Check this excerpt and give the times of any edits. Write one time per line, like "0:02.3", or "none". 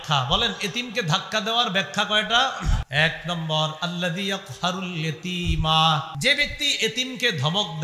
0:02.8
0:06.1